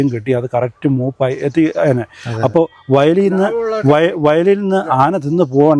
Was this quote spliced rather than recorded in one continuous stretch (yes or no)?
no